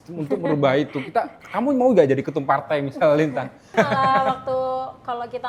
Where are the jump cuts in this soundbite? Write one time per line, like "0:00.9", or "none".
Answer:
0:03.7